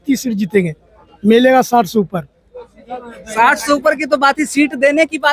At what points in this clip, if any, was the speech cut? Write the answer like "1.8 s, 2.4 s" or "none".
none